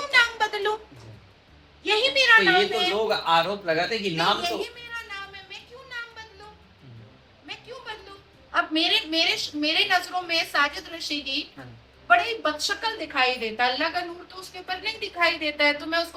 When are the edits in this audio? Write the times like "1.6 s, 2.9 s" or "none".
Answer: none